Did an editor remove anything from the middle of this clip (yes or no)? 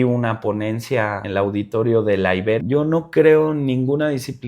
yes